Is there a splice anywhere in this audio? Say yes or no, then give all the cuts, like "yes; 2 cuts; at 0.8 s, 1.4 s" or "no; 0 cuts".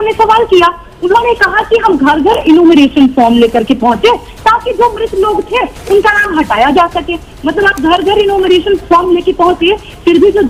no; 0 cuts